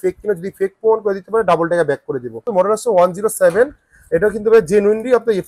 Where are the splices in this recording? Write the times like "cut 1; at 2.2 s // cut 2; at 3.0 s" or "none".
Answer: cut 1; at 2.5 s